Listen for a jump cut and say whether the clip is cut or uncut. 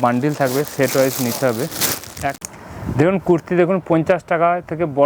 cut